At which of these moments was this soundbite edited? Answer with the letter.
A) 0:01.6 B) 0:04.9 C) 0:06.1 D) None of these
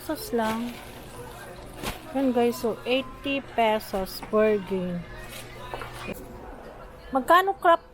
C